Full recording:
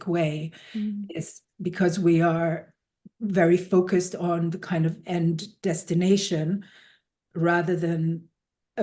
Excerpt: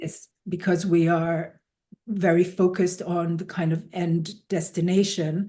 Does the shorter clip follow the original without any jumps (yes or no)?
yes